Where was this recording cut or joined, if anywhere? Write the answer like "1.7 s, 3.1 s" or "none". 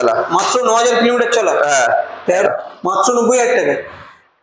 2.4 s